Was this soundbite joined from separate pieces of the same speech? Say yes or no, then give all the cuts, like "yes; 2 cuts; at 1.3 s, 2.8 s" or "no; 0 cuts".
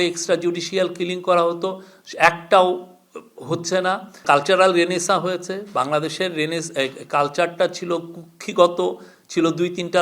yes; 1 cut; at 4.1 s